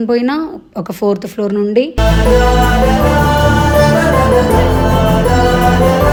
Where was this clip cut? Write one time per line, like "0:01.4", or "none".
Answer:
none